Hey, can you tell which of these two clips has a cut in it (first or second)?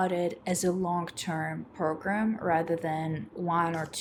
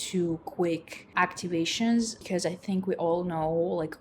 second